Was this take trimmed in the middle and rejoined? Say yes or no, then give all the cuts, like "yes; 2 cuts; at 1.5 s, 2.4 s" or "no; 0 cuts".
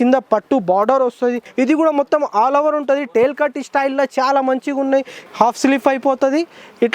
yes; 2 cuts; at 1.4 s, 5.1 s